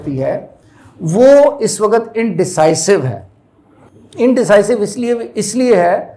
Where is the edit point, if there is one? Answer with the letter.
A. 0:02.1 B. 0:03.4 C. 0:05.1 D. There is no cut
D